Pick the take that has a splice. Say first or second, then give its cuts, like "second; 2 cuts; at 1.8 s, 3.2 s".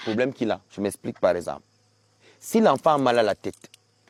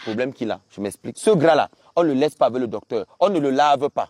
second; 1 cut; at 1.1 s